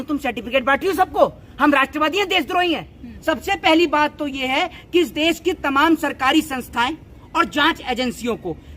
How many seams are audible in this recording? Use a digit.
1